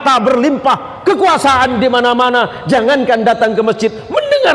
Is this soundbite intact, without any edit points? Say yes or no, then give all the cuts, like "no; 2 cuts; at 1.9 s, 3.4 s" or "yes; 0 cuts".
yes; 0 cuts